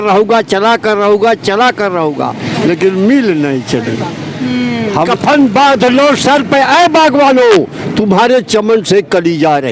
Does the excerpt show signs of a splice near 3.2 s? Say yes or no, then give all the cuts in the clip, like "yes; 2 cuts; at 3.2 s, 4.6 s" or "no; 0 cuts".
no; 1 cut; at 5.1 s